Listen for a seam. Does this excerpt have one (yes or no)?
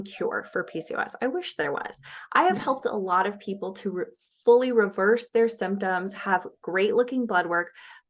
no